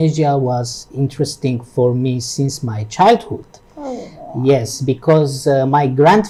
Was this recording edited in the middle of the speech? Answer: no; 0 cuts

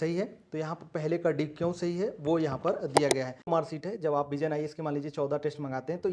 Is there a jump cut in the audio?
yes; 1 cut; at 3.5 s

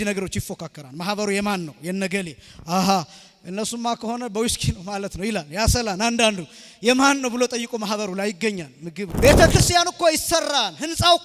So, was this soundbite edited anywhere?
yes; 1 cut; at 9.1 s

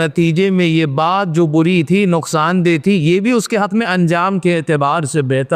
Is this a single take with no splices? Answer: yes; 0 cuts

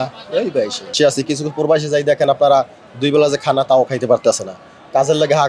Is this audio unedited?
no; 1 cut; at 1.0 s

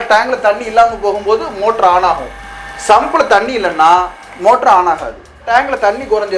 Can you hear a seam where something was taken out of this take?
yes; 1 cut; at 5.5 s

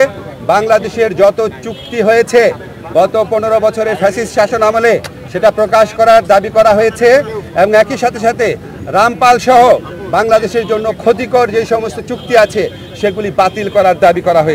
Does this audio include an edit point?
no; 0 cuts

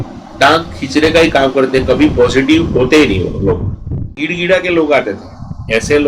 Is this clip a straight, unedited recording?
no; 1 cut; at 4.1 s

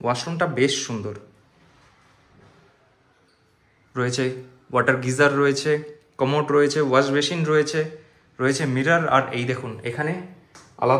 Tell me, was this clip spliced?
no; 0 cuts

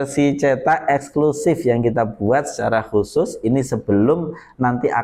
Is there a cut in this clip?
no; 0 cuts

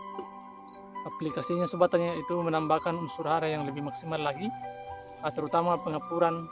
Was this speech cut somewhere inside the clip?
no; 0 cuts

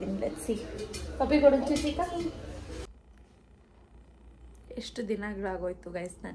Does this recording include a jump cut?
yes; 1 cut; at 2.9 s

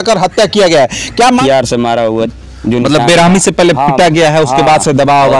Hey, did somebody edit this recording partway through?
yes; 1 cut; at 1.2 s

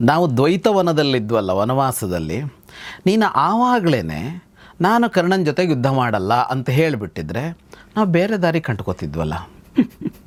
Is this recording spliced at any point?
no; 0 cuts

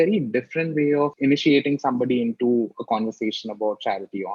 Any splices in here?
yes; 1 cut; at 1.1 s

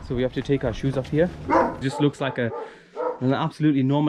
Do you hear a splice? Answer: yes; 1 cut; at 1.8 s

